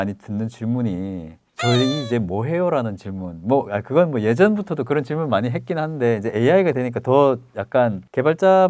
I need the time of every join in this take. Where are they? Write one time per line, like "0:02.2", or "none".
none

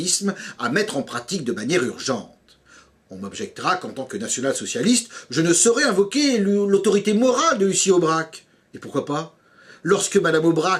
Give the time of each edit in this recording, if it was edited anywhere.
0:07.1

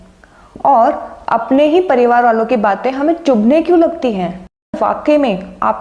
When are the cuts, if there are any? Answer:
0:04.8

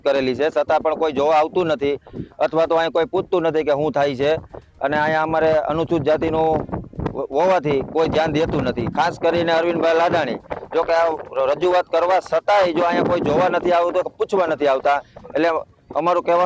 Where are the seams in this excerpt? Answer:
none

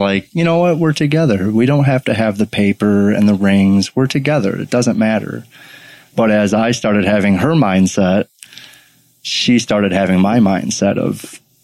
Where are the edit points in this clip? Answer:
none

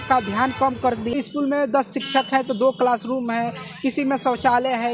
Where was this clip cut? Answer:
0:01.1

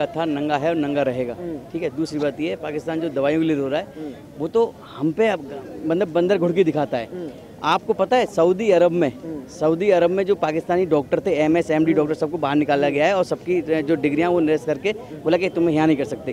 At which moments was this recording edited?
none

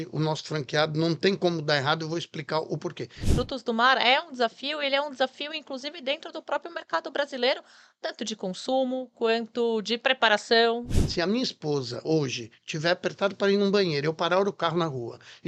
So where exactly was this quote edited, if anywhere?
0:03.3
0:10.9

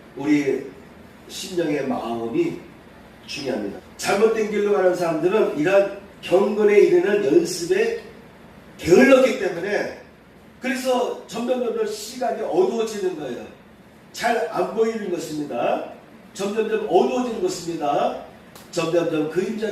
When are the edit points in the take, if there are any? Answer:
0:03.7

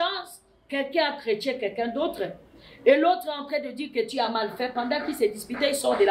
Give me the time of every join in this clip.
none

